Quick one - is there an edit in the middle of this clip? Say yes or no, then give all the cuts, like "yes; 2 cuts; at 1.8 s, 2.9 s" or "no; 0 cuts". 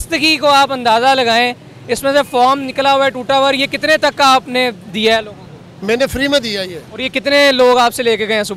no; 0 cuts